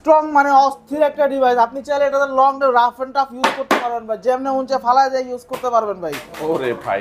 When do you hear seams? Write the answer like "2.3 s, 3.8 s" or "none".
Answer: none